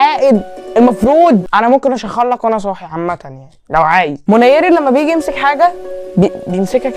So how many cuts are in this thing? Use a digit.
2